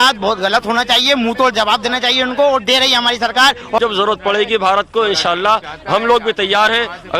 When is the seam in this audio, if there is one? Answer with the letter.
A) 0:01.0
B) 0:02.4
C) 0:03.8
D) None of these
C